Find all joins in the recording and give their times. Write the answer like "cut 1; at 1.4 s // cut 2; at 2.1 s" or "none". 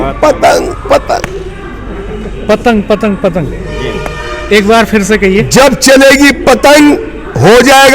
none